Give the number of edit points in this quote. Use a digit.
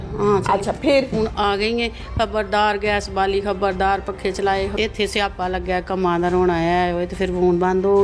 2